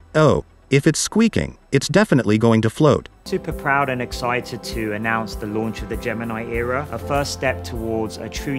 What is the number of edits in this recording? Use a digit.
0